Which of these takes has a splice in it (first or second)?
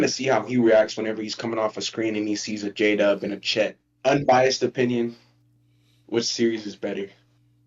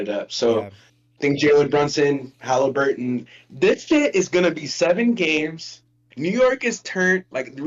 first